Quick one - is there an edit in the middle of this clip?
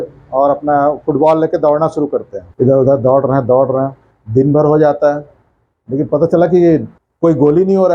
yes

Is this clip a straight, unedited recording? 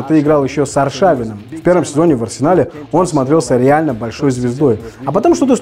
yes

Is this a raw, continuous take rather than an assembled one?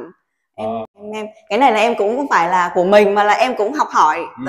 yes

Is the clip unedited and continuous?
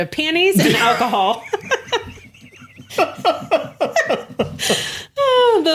yes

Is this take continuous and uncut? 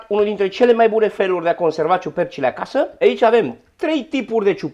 no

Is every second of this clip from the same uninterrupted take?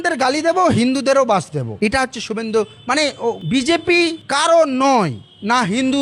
yes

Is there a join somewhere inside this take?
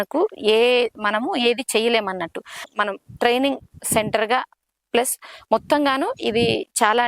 yes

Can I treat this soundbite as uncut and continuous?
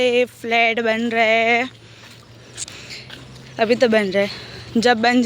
yes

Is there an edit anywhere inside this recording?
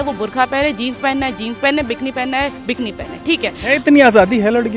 no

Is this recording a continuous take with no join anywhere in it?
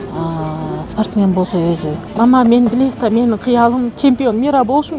no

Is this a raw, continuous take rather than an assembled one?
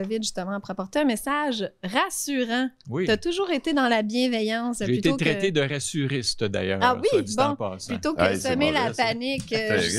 yes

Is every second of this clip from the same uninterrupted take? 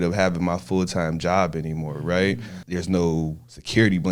no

